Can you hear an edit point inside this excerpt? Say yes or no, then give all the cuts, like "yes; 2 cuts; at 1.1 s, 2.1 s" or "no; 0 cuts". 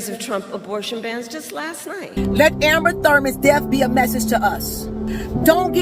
yes; 1 cut; at 2.1 s